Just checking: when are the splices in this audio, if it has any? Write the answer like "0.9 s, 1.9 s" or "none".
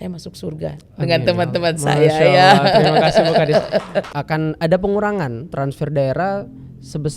4.2 s